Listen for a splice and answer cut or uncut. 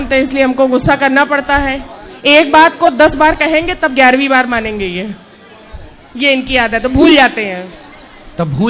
uncut